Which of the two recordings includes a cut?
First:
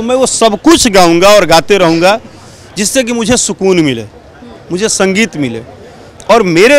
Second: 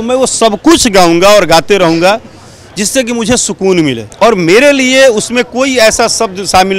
second; 1 cut; at 4.1 s

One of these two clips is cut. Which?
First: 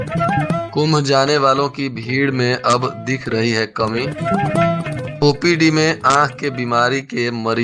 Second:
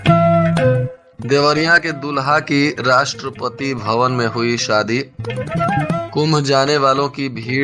second; 1 cut; at 1.0 s

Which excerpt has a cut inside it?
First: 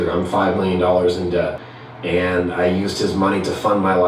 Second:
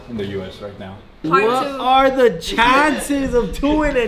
second; 1 cut; at 1.2 s

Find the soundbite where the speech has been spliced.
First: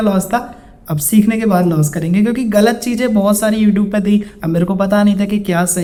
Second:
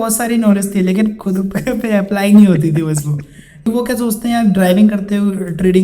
second; 1 cut; at 3.6 s

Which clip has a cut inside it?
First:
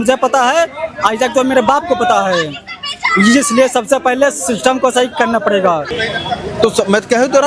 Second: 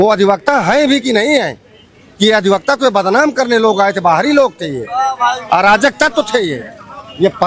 first; 1 cut; at 5.8 s

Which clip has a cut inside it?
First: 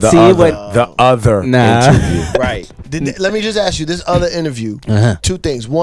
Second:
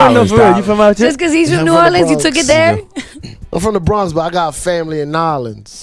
first; 1 cut; at 3.3 s

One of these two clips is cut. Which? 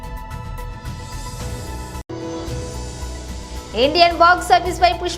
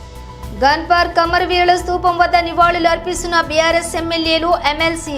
first; 1 cut; at 3.4 s

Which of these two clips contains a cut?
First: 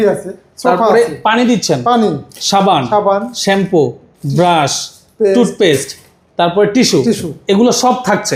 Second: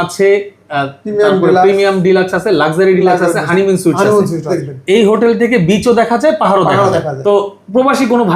second; 2 cuts; at 4.6 s, 7.1 s

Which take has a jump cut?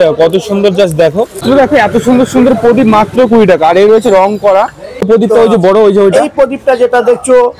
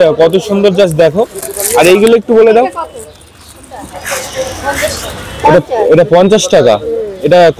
first; 2 cuts; at 1.4 s, 5.1 s

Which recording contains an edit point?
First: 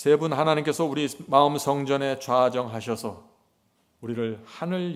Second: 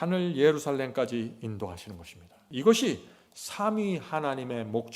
second; 1 cut; at 2.4 s

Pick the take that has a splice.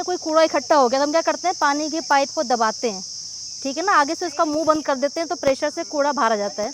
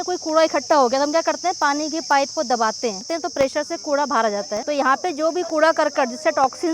second; 2 cuts; at 3.1 s, 4.6 s

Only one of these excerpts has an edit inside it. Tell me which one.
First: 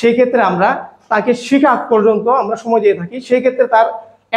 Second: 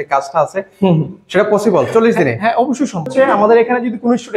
second; 1 cut; at 3.3 s

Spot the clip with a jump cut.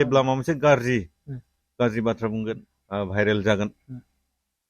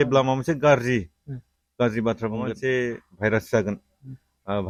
first; 1 cut; at 2.5 s

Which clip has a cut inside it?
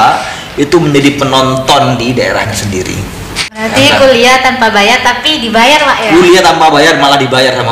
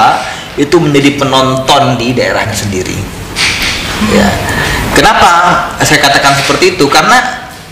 first; 1 cut; at 3.7 s

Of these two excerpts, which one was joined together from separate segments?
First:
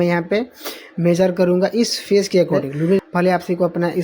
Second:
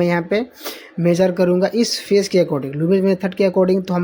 first; 1 cut; at 3.0 s

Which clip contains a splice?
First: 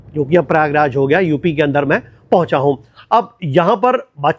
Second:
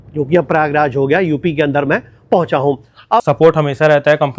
second; 1 cut; at 3.2 s

